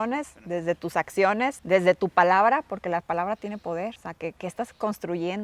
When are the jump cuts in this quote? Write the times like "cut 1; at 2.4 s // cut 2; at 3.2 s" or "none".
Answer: cut 1; at 1.6 s // cut 2; at 4.1 s